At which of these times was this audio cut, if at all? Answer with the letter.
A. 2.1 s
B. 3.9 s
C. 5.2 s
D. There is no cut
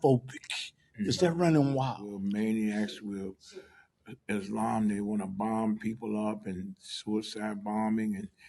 A